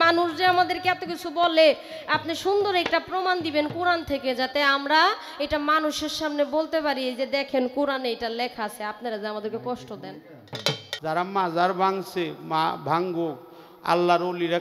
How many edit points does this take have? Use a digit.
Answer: 1